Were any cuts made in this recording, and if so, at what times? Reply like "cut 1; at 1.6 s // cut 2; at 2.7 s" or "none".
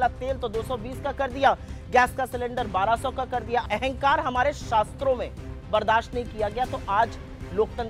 cut 1; at 3.6 s